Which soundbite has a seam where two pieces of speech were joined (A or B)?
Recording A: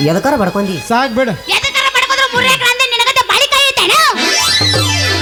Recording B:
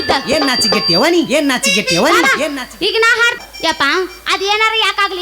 B